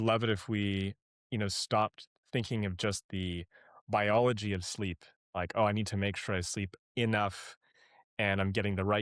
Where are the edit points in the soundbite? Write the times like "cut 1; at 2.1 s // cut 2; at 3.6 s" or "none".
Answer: none